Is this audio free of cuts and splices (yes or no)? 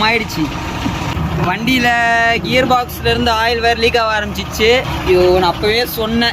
no